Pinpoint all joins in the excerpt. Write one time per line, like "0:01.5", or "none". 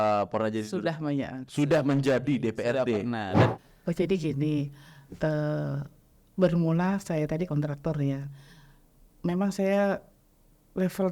0:03.5